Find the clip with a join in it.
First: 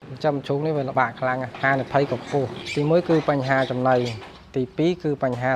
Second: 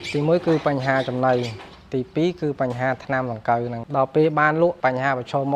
first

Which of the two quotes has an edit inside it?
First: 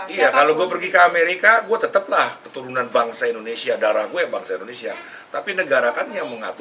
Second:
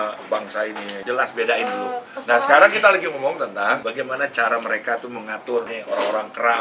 second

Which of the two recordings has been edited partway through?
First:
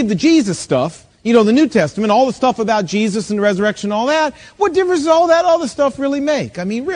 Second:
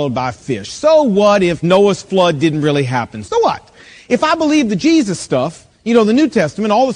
second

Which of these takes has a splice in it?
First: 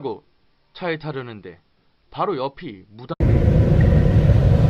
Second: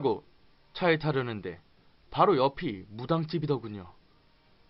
second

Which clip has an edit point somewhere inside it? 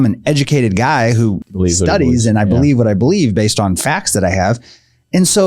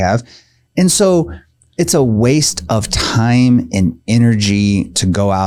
first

